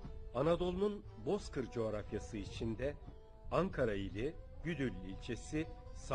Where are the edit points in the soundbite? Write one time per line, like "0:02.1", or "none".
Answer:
none